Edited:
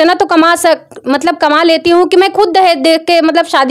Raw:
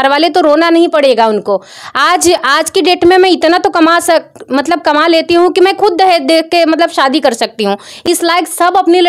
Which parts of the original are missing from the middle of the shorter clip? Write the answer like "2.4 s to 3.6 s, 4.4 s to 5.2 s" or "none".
none